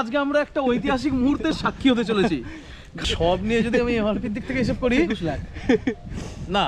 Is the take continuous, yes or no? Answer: no